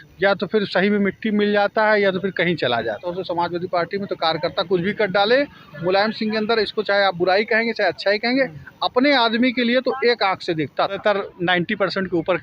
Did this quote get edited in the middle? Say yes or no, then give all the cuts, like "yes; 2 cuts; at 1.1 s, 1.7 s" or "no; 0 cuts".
yes; 2 cuts; at 3.1 s, 11.0 s